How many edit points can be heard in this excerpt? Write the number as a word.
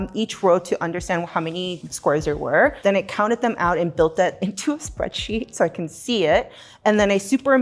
one